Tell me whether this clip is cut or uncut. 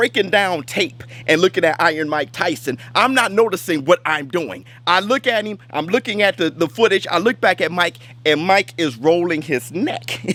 uncut